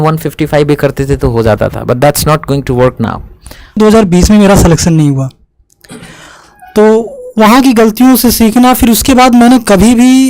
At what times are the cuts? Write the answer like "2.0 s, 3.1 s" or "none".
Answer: 3.8 s